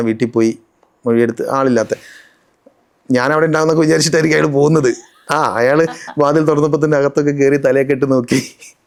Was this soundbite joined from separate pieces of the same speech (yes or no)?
no